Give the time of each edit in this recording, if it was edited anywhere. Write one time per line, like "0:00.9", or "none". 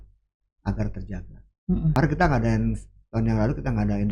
0:02.0